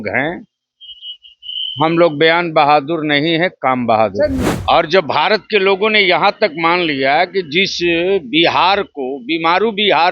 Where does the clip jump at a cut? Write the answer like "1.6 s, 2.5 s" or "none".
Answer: 4.5 s